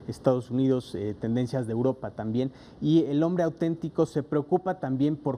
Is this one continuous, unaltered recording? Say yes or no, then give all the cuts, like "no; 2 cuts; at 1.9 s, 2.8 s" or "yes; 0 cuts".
yes; 0 cuts